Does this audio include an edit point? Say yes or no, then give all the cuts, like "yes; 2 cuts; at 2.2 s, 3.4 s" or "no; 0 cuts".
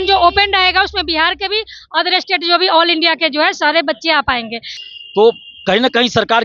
yes; 1 cut; at 4.7 s